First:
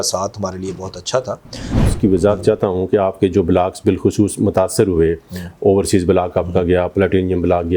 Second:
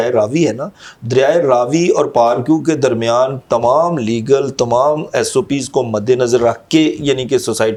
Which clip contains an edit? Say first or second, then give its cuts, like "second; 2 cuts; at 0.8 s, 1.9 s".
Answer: first; 1 cut; at 1.7 s